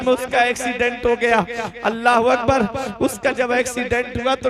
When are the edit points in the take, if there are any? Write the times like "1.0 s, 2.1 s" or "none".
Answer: none